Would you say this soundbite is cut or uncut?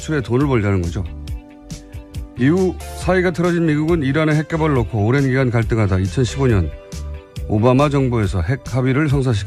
uncut